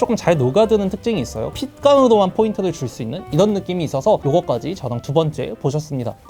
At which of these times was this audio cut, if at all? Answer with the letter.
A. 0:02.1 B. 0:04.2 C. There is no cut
C